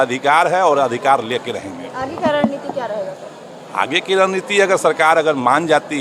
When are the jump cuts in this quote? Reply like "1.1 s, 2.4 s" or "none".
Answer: none